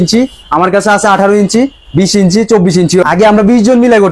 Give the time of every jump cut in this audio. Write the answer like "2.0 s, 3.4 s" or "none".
3.0 s